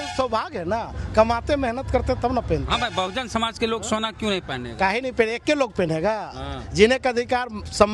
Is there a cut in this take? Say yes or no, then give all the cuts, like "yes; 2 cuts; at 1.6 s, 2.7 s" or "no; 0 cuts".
no; 0 cuts